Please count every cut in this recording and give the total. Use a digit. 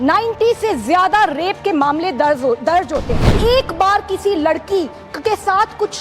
1